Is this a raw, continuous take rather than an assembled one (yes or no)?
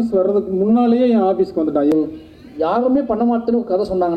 no